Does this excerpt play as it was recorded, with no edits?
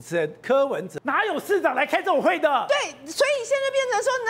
no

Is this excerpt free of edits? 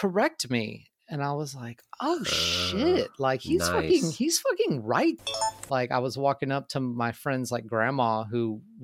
no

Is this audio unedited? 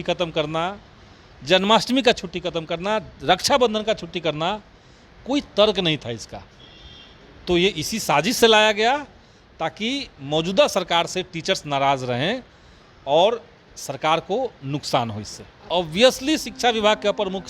no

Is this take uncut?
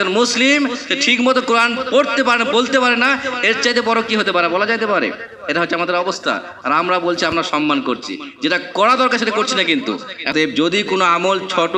no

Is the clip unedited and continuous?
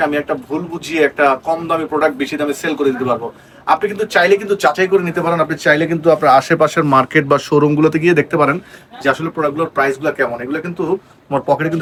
yes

